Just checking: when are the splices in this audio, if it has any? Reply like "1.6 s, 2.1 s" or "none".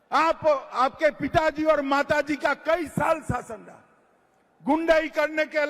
none